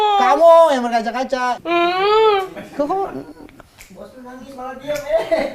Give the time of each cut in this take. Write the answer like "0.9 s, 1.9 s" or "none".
1.6 s